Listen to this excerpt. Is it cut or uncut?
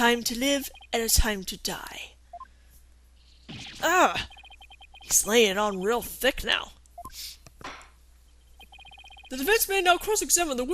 uncut